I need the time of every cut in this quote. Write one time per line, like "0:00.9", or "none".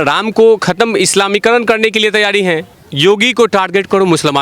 0:02.7